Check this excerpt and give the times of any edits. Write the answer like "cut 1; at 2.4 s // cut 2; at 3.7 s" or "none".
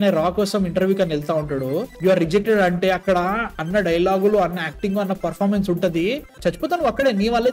none